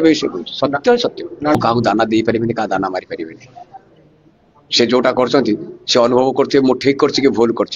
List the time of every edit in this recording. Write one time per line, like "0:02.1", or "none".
0:01.5